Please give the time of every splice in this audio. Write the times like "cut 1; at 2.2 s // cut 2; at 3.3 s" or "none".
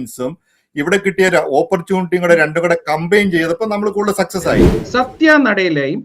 cut 1; at 4.7 s